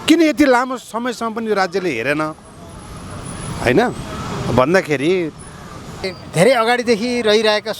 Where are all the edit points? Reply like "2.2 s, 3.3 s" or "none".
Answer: 6.2 s